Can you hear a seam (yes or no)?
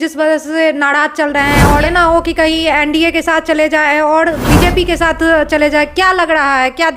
yes